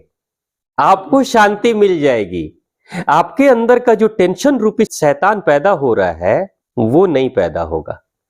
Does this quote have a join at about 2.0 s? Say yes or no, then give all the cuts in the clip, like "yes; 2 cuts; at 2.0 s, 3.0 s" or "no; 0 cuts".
no; 2 cuts; at 4.9 s, 6.6 s